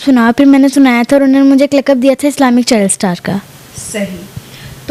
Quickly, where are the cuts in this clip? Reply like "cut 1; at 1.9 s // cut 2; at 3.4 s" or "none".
none